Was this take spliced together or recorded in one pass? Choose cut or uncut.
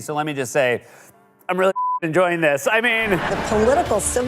cut